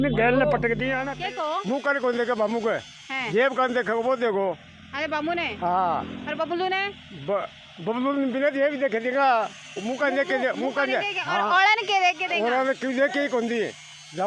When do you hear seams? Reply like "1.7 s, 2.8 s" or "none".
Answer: 1.0 s